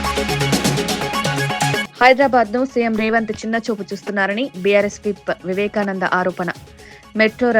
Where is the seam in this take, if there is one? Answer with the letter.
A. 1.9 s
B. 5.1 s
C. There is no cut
A